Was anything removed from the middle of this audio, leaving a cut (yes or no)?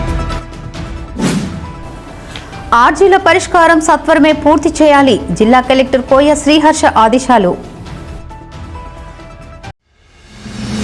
no